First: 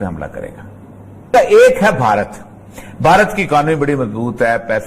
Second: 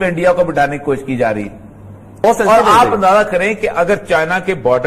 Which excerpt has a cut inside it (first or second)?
first